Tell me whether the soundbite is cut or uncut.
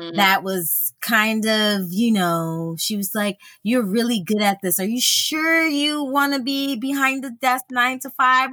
uncut